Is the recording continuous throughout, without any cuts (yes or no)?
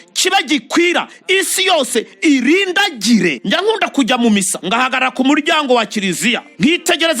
yes